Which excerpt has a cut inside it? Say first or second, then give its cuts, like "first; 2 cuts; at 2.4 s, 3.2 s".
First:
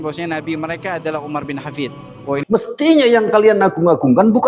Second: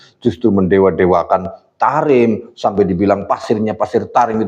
first; 1 cut; at 2.4 s